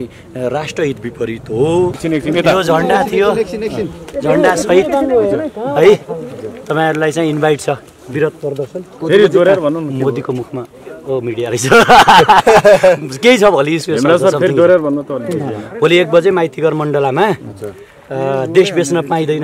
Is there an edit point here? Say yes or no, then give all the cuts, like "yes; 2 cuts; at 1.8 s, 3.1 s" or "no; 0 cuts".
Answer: no; 0 cuts